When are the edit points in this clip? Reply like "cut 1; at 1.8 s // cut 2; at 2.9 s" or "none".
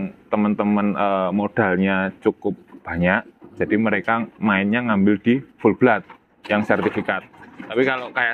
none